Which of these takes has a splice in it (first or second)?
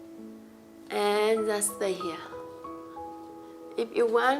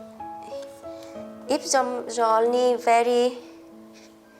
second